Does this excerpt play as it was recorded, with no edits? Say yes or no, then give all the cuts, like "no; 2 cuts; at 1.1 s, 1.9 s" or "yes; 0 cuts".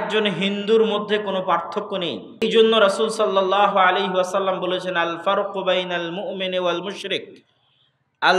no; 1 cut; at 2.2 s